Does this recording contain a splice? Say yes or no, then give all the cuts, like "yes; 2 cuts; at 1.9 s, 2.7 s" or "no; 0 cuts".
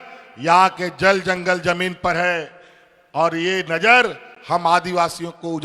no; 0 cuts